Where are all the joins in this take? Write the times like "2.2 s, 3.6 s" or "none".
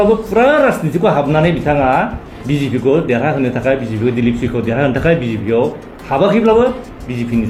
none